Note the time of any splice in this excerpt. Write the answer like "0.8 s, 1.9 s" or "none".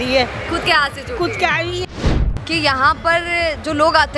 1.9 s